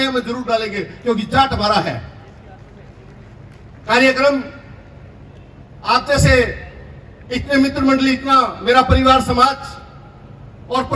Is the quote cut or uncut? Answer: uncut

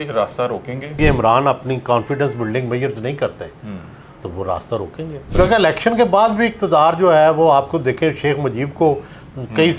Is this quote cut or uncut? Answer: cut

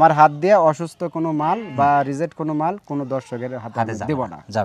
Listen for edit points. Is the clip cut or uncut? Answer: uncut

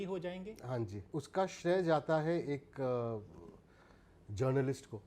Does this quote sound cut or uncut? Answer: cut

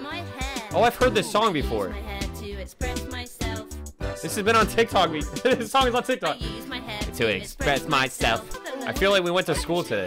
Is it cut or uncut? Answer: uncut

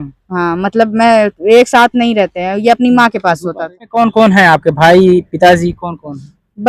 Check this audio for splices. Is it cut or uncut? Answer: cut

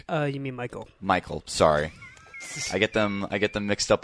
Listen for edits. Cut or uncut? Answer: uncut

